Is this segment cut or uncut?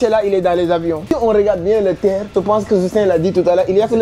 cut